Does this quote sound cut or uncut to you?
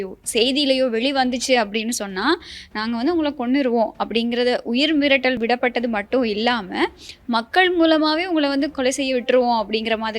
cut